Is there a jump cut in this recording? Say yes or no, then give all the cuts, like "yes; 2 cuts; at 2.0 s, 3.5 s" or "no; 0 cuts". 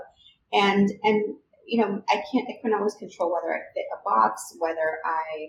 no; 0 cuts